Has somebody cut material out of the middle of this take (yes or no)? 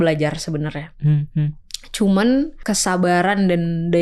yes